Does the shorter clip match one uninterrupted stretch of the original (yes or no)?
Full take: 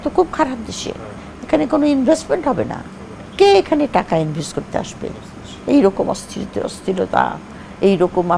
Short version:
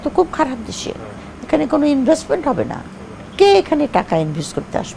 yes